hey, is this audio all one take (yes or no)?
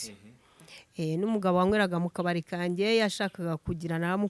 yes